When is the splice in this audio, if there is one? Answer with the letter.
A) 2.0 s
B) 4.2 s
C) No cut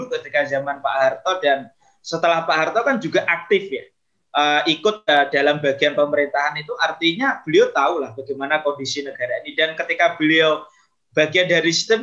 C